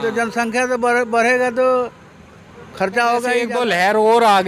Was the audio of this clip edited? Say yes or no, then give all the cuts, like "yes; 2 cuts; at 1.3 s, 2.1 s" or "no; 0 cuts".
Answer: yes; 1 cut; at 3.5 s